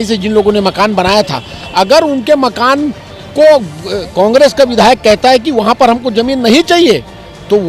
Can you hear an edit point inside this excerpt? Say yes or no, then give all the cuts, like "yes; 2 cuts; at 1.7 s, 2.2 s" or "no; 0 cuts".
no; 0 cuts